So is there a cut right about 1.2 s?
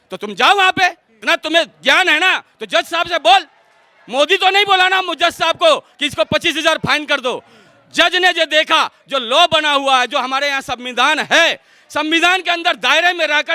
yes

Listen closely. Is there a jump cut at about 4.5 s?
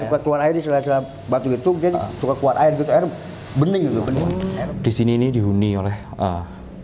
yes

